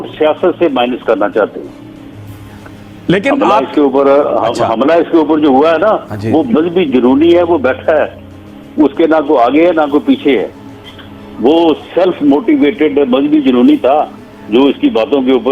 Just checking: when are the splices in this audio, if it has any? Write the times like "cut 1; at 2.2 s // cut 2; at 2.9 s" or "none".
none